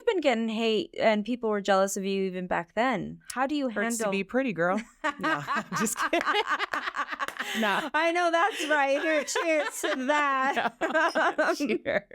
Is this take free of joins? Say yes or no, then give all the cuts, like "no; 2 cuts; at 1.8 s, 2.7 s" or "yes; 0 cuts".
no; 1 cut; at 0.9 s